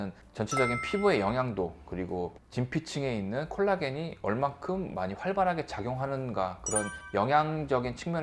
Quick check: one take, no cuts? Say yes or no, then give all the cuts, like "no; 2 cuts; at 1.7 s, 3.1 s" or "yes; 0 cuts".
yes; 0 cuts